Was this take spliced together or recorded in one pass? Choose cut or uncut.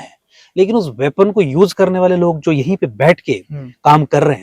uncut